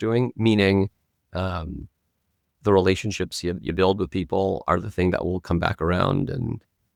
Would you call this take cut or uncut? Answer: uncut